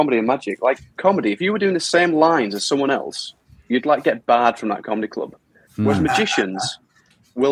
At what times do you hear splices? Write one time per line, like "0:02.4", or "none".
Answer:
0:01.0